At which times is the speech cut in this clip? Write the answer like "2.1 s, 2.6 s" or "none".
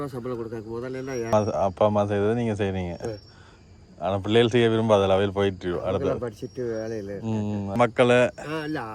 1.3 s, 7.8 s